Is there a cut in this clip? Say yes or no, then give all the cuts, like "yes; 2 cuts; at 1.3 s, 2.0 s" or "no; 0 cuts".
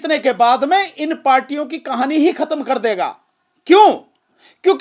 no; 0 cuts